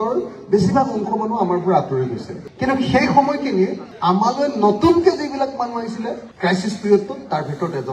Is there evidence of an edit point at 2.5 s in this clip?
no; 0 cuts

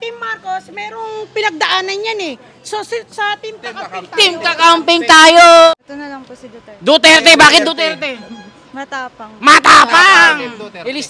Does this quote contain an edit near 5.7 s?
yes; 1 cut; at 5.7 s

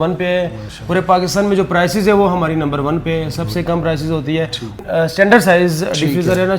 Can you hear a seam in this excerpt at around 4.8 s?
yes; 1 cut; at 4.8 s

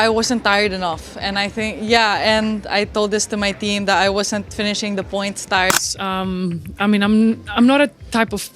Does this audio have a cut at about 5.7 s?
yes; 1 cut; at 5.7 s

